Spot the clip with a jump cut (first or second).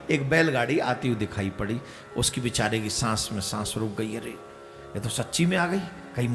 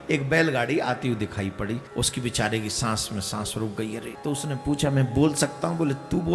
second